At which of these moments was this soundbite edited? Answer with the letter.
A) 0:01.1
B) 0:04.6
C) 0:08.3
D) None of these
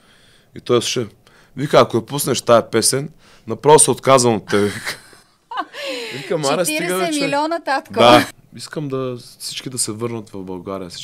C